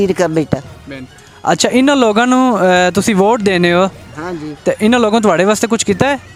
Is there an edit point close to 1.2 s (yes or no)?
no